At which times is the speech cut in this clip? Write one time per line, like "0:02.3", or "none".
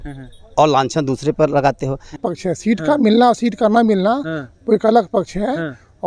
0:02.2